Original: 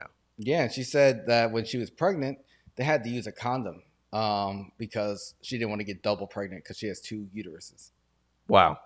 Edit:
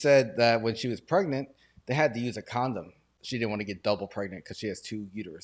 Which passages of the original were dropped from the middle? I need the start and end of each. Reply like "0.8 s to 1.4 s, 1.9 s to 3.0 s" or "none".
4.0 s to 5.3 s